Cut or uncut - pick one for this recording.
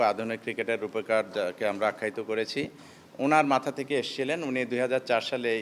uncut